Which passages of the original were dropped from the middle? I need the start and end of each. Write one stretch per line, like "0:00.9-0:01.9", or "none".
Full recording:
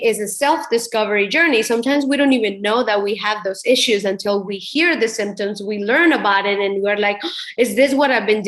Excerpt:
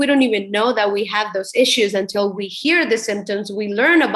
none